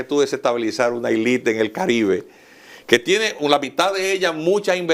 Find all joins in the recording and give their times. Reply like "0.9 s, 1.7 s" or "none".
none